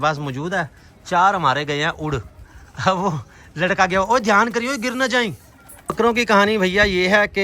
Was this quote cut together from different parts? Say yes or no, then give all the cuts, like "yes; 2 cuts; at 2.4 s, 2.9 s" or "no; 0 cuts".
yes; 1 cut; at 5.8 s